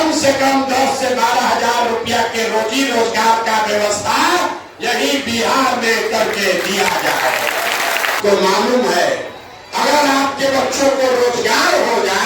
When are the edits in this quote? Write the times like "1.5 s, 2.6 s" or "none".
8.2 s